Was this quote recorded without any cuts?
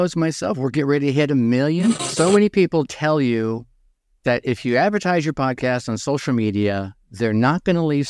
no; 1 cut; at 2.1 s

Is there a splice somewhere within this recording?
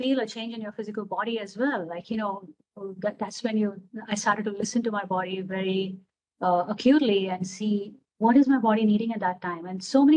no; 0 cuts

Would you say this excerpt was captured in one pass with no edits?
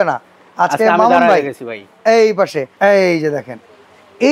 no; 1 cut; at 2.7 s

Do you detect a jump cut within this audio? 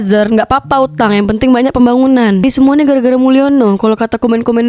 yes; 1 cut; at 2.4 s

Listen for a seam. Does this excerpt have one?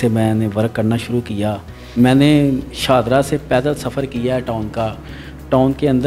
yes; 1 cut; at 1.7 s

